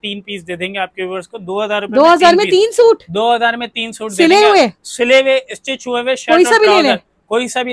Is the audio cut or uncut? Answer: uncut